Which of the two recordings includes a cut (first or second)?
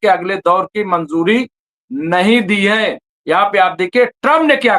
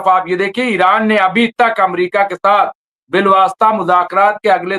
first